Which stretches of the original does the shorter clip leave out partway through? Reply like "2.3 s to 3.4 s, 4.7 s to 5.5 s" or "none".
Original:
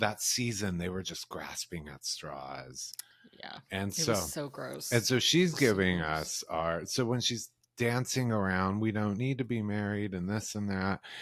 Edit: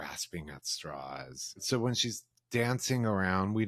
3.0 s to 6.9 s